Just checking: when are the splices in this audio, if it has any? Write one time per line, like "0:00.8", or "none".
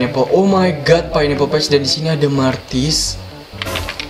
none